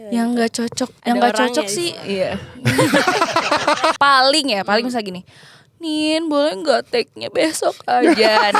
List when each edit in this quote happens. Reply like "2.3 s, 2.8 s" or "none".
1.0 s, 3.9 s